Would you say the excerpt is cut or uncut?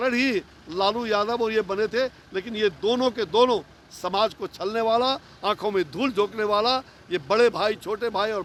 uncut